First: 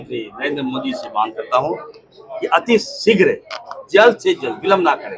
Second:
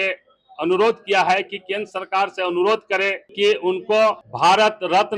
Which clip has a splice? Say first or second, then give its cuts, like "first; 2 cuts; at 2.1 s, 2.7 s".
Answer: second; 2 cuts; at 3.2 s, 4.3 s